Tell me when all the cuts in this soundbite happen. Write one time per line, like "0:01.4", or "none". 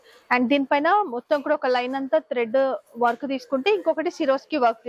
none